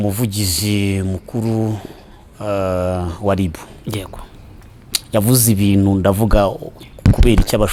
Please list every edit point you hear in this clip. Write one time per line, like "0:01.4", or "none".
none

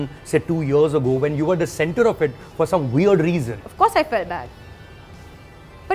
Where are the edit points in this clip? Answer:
0:03.6

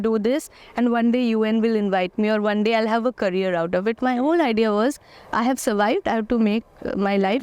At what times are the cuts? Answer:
none

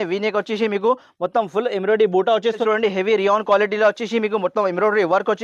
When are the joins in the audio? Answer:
0:02.6

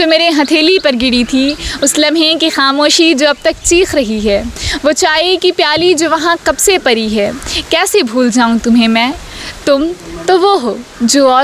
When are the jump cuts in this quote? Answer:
none

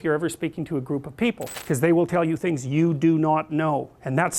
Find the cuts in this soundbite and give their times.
0:01.5

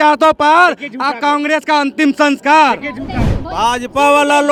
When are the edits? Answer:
none

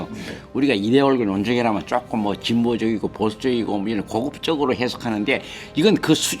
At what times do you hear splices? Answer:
none

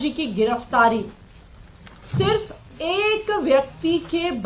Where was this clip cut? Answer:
none

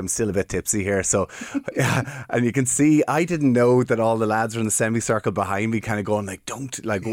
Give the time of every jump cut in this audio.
none

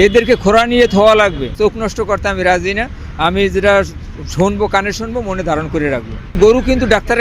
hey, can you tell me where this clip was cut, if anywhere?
0:01.5
0:06.3

